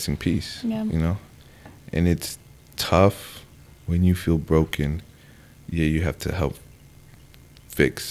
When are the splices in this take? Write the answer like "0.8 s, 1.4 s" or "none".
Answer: none